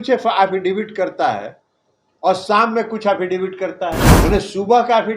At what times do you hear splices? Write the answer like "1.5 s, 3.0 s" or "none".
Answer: 4.1 s